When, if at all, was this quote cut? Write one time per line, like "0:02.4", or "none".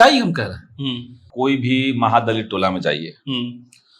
0:01.2